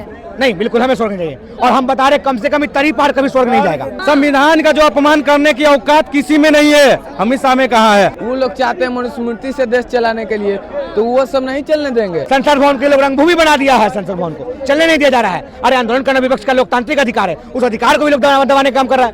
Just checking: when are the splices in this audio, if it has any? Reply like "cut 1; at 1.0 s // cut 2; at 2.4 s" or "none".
cut 1; at 3.9 s // cut 2; at 8.2 s // cut 3; at 12.2 s